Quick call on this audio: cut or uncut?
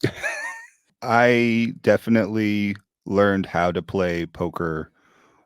cut